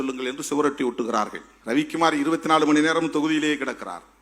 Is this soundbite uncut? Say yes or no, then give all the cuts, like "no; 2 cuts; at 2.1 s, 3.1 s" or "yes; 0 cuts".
no; 1 cut; at 1.5 s